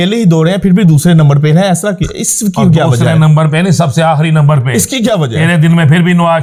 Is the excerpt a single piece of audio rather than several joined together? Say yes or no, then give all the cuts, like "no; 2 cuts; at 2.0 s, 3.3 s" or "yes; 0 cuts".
yes; 0 cuts